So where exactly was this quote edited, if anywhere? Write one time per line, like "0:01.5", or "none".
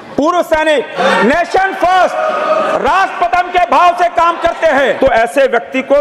0:00.9
0:05.0